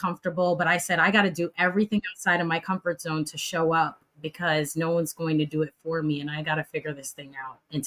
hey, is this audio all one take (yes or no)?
yes